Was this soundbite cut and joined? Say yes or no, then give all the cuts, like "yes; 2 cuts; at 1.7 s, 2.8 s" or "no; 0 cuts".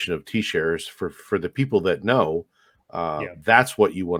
no; 0 cuts